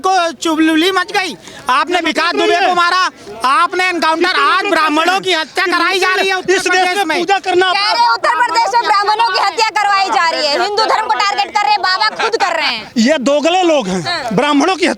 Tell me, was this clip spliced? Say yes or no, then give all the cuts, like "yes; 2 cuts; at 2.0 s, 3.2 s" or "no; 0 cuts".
no; 0 cuts